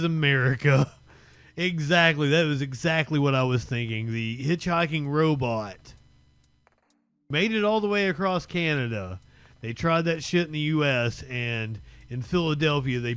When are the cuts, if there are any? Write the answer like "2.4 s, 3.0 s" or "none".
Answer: none